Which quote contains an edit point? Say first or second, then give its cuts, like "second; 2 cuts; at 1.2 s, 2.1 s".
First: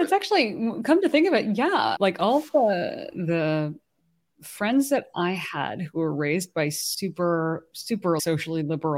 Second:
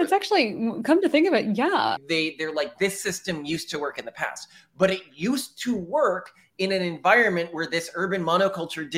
second; 1 cut; at 1.9 s